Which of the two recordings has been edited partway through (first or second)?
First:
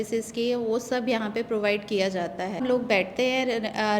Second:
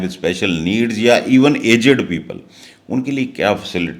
first